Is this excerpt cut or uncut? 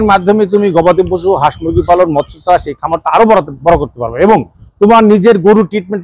uncut